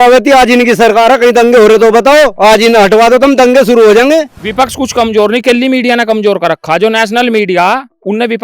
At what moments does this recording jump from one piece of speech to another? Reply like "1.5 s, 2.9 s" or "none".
4.3 s